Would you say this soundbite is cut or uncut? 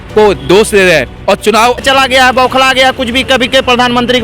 cut